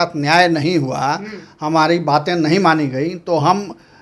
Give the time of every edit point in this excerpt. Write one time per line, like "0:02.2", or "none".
none